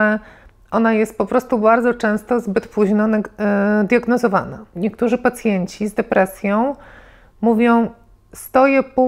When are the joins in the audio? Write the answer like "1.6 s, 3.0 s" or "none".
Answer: 4.7 s